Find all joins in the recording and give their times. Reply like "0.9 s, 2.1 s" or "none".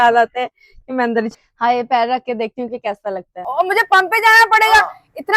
1.3 s, 3.3 s